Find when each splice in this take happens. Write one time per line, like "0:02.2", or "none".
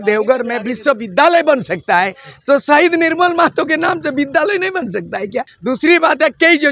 0:05.5